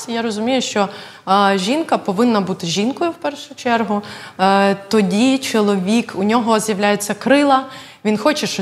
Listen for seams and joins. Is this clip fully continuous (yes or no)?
yes